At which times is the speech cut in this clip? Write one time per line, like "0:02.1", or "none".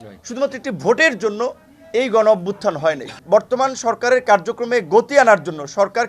0:03.1